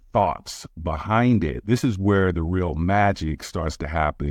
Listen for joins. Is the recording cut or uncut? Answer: cut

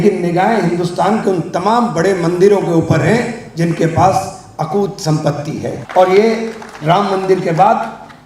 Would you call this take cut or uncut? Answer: cut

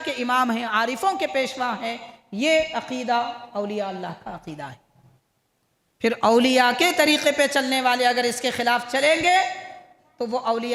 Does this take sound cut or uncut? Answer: uncut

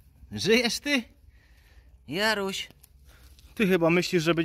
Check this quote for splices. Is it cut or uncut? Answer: uncut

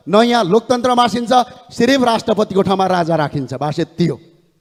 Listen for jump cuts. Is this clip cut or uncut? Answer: uncut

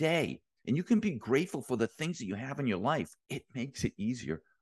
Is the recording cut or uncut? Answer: cut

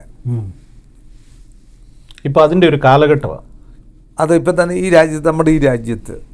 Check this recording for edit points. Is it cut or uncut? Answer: uncut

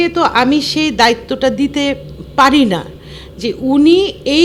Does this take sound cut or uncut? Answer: uncut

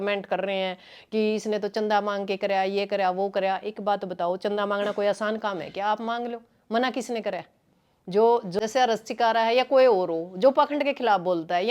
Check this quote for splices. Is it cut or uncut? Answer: cut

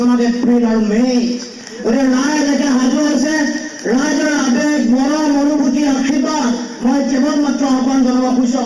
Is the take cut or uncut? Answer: uncut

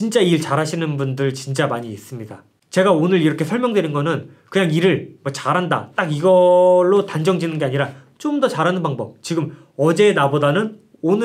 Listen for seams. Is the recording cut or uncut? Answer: uncut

